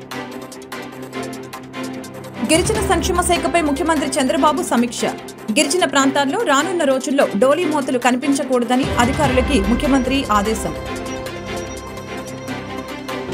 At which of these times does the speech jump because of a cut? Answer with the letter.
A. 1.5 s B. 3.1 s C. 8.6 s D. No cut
A